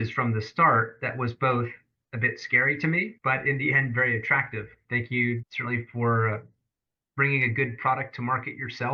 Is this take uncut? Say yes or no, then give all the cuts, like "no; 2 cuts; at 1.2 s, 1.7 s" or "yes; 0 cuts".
no; 1 cut; at 4.8 s